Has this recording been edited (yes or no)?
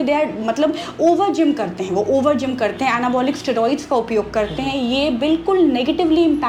no